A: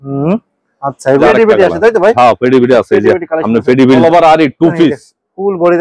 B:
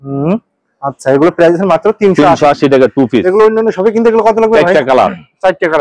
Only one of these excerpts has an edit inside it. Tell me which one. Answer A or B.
A